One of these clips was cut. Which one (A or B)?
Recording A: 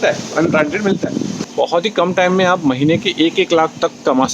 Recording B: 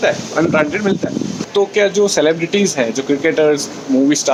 A